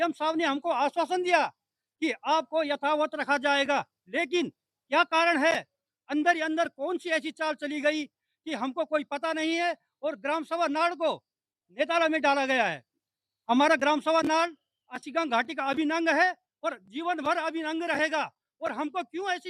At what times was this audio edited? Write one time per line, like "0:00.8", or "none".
none